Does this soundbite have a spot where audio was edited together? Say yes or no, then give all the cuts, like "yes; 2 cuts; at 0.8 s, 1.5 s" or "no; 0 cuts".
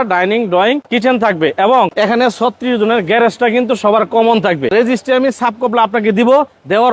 yes; 3 cuts; at 0.9 s, 1.9 s, 4.7 s